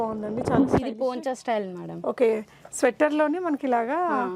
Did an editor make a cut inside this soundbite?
no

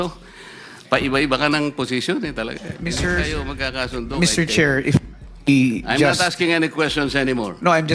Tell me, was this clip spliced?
yes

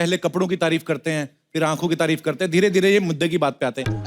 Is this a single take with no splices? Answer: yes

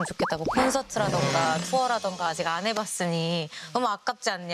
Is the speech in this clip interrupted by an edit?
no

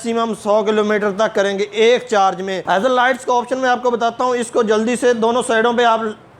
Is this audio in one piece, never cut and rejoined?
no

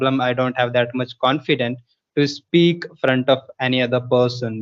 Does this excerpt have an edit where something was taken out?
no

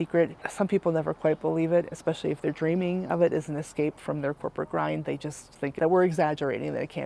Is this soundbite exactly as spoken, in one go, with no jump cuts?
yes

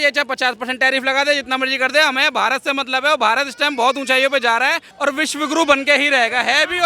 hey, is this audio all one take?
no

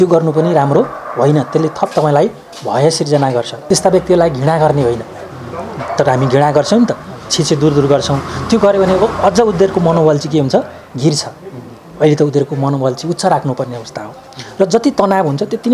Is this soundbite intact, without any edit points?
no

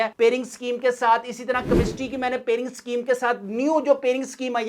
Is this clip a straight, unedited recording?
yes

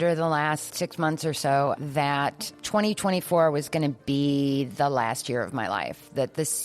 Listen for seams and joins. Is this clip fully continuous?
yes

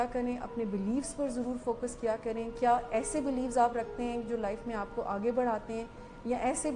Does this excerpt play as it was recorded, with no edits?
yes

